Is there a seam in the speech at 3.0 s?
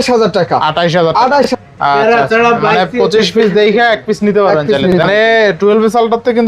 no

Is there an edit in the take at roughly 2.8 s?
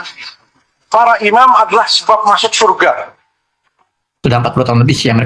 no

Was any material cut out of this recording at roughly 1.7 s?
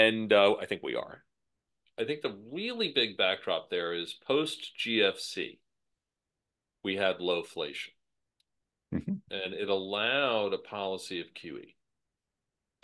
yes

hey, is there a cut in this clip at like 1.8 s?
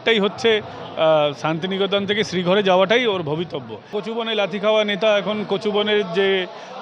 no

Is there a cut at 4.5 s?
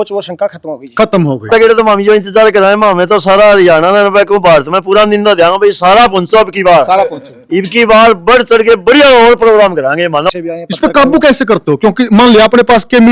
no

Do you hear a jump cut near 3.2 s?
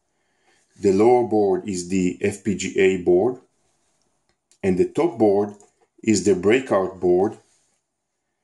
no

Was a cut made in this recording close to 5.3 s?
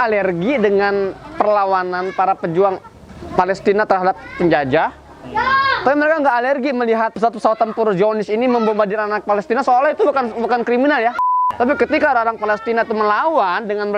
no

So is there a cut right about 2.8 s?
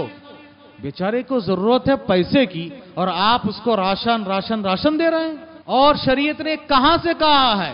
no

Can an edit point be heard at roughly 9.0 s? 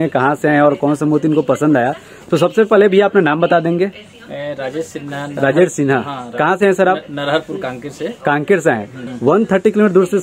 yes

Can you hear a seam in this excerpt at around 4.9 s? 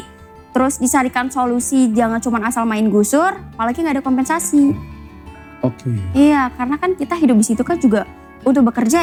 no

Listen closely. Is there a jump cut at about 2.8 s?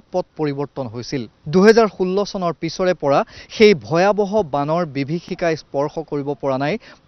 no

